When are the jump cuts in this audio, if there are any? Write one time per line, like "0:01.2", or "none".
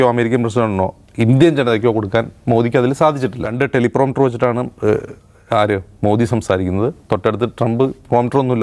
0:03.4